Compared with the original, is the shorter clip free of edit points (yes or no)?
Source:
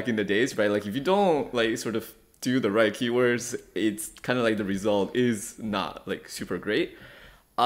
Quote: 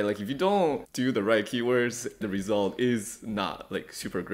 no